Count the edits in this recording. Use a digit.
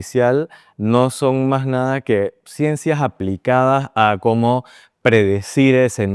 0